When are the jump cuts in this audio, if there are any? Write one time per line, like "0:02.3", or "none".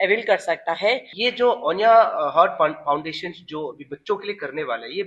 0:01.1